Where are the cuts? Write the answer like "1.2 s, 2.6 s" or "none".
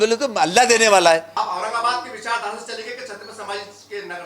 1.3 s